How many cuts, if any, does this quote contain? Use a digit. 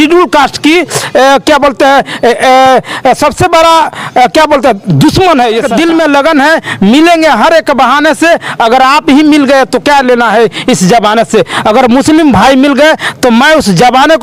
1